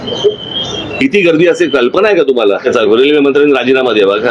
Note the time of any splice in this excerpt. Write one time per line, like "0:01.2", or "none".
0:02.7